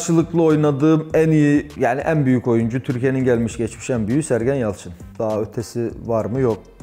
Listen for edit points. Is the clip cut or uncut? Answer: uncut